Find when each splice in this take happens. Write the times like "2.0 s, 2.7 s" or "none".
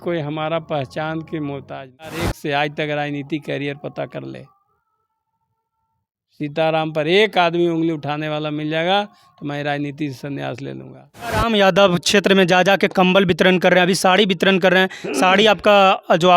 2.2 s, 11.4 s